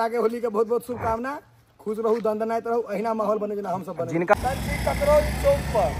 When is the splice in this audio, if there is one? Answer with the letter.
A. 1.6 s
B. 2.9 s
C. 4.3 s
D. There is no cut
C